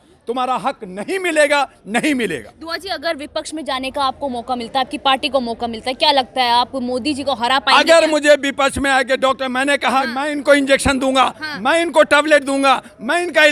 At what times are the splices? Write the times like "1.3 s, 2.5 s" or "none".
none